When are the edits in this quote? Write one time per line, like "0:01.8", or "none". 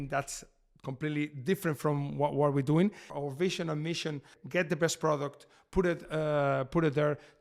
0:03.1
0:04.3